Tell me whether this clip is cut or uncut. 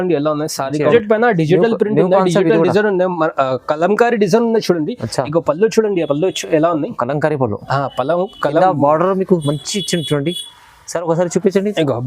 cut